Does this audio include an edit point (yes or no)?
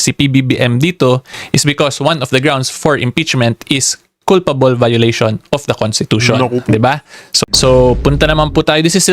yes